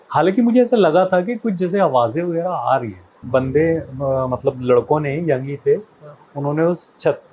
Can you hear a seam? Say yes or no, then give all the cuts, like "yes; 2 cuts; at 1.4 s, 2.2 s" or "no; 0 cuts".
yes; 1 cut; at 3.2 s